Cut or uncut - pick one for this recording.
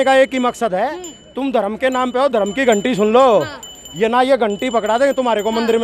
uncut